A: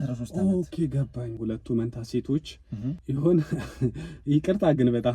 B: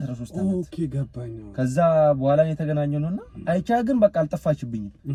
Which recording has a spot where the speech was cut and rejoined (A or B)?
A